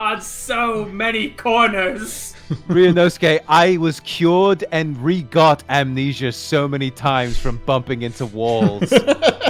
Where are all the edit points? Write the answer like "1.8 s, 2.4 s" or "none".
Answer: none